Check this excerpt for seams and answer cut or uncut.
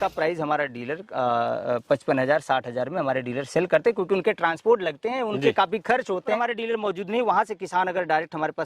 cut